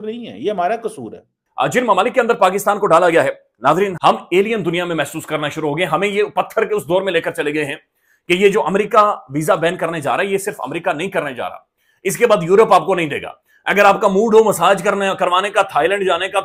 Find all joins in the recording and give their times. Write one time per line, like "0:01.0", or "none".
0:01.4

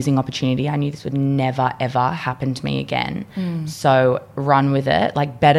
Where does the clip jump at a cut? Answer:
none

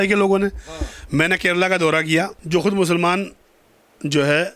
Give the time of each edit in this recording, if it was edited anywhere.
0:02.4

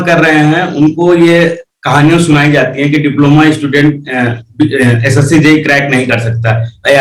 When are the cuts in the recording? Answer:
none

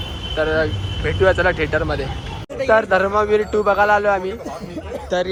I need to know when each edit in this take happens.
none

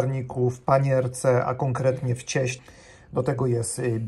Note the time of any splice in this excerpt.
0:02.6

